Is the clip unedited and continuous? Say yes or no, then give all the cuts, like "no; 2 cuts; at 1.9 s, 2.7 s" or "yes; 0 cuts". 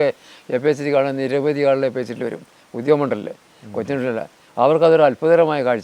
yes; 0 cuts